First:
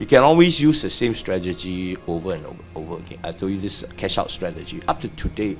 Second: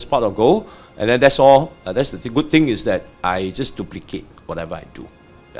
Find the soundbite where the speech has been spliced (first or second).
first